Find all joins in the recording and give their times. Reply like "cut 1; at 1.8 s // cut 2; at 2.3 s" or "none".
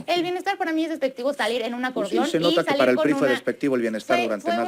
none